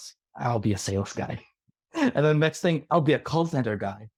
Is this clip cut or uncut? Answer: uncut